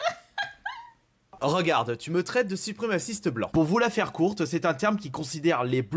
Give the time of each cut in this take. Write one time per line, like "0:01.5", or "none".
0:01.4